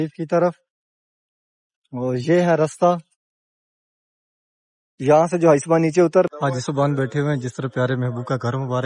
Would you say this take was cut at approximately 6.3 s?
yes; 1 cut; at 6.3 s

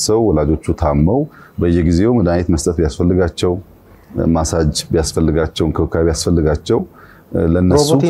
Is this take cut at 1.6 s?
no; 0 cuts

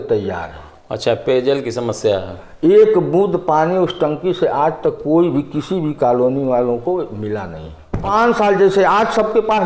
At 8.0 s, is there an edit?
yes; 1 cut; at 8.0 s

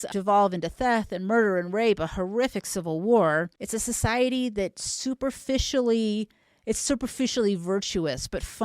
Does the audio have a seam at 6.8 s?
yes; 2 cuts; at 3.6 s, 6.8 s

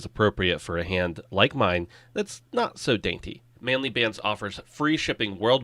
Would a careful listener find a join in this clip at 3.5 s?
yes; 1 cut; at 3.5 s

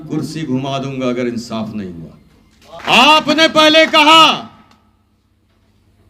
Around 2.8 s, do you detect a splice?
yes; 1 cut; at 2.8 s

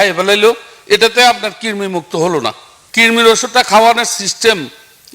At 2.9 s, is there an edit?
yes; 1 cut; at 2.9 s

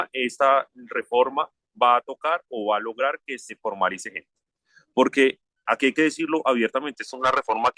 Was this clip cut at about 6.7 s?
no; 1 cut; at 4.6 s

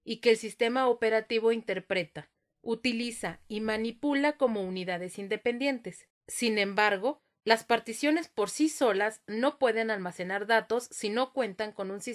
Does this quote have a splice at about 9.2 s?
no; 1 cut; at 7.6 s

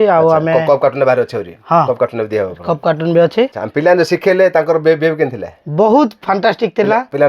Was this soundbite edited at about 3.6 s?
yes; 1 cut; at 3.6 s

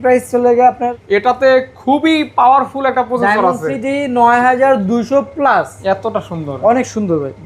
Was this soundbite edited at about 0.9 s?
yes; 2 cuts; at 0.9 s, 5.7 s

